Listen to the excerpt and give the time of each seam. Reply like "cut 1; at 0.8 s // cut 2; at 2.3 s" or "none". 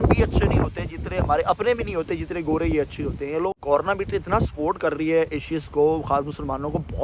cut 1; at 3.5 s

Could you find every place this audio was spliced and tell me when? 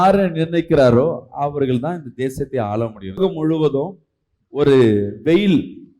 cut 1; at 3.2 s

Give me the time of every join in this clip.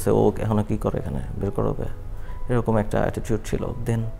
none

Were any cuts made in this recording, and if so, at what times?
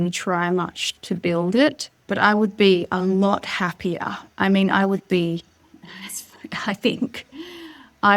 cut 1; at 2.0 s

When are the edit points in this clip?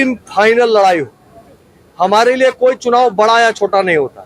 none

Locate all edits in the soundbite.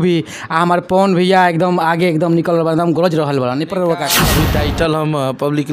cut 1; at 4.2 s

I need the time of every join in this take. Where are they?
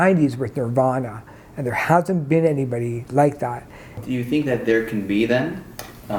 cut 1; at 4.0 s

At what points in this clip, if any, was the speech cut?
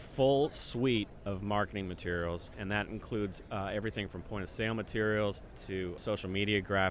cut 1; at 2.5 s // cut 2; at 5.9 s

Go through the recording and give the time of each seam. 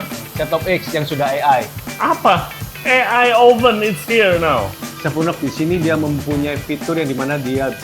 cut 1; at 1.8 s // cut 2; at 4.8 s

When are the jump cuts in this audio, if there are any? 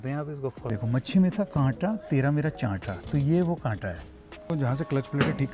cut 1; at 0.8 s // cut 2; at 4.5 s

